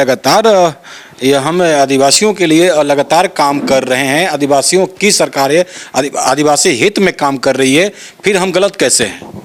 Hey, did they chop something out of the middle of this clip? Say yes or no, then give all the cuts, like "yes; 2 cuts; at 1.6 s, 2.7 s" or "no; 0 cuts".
no; 0 cuts